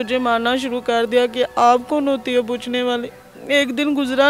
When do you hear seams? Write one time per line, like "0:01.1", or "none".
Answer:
0:03.3